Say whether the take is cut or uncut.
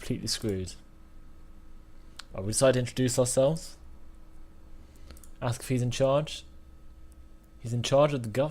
cut